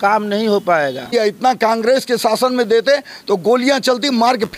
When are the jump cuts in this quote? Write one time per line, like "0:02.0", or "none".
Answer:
0:01.1